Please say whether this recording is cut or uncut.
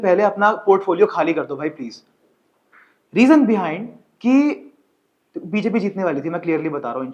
uncut